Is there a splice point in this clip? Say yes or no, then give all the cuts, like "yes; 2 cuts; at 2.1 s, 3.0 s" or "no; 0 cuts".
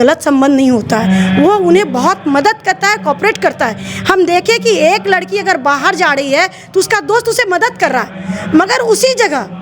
no; 0 cuts